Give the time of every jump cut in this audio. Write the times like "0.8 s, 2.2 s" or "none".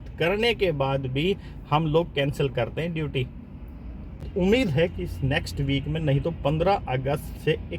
4.3 s